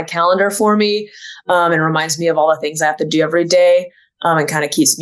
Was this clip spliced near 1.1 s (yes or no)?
no